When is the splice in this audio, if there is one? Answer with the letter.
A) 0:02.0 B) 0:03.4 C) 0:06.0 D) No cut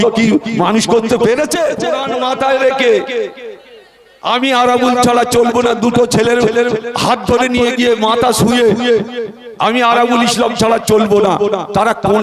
A